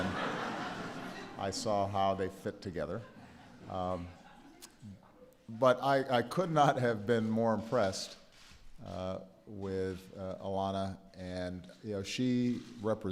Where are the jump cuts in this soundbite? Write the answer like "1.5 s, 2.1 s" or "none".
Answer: 7.6 s